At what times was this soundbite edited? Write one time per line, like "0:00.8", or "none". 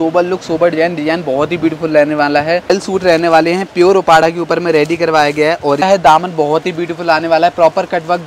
0:02.7
0:05.8